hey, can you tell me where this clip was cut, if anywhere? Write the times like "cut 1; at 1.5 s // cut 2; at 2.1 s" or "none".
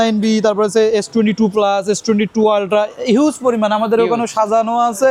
none

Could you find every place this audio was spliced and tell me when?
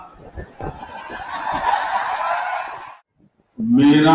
cut 1; at 2.7 s

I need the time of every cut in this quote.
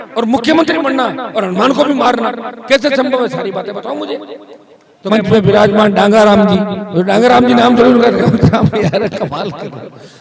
cut 1; at 5.1 s

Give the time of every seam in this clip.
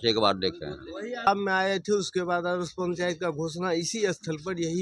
cut 1; at 1.3 s

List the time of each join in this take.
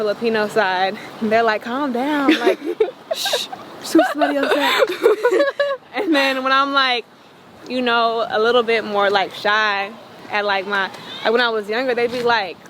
none

